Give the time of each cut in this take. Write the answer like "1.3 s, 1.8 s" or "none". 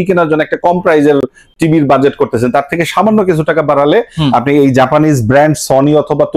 none